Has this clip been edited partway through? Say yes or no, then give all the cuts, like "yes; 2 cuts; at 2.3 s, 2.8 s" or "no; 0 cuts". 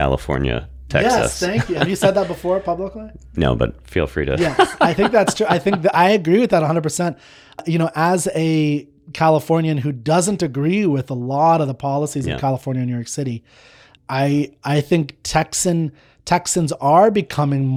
no; 0 cuts